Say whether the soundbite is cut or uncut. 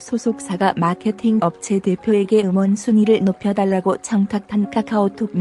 uncut